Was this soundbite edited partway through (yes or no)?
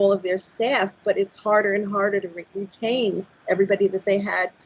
no